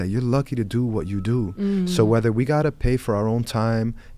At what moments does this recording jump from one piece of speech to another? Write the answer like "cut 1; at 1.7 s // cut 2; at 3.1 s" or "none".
none